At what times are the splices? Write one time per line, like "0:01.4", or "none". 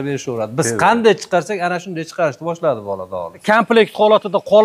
0:03.3